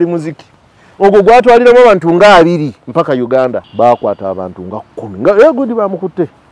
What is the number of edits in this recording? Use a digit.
1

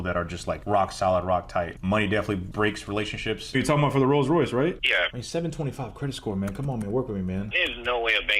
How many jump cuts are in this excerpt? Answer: 3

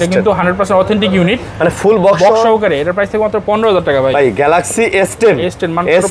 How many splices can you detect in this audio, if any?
0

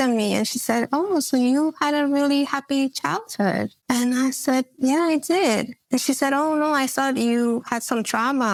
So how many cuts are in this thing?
0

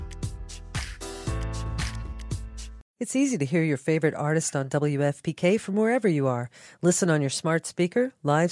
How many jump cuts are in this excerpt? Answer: 1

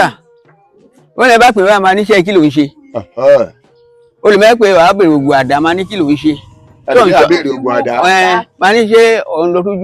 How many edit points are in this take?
0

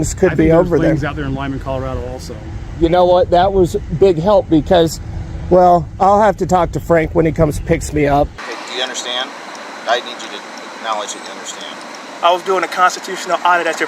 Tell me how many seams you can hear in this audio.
1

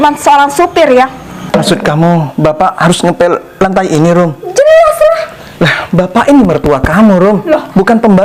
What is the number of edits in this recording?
1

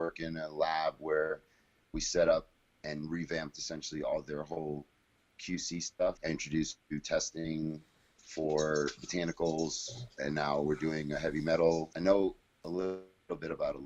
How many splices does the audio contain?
2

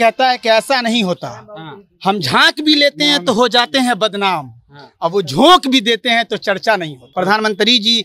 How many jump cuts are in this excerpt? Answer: 1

